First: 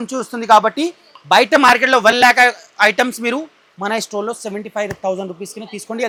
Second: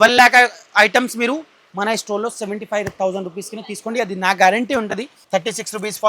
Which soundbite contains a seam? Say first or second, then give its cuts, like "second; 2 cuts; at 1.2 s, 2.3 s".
second; 1 cut; at 5.1 s